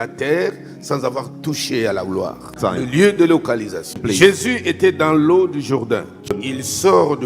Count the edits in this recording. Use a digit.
3